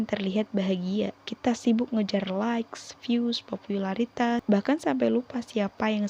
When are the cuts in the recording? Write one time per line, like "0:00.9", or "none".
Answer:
0:01.2
0:04.4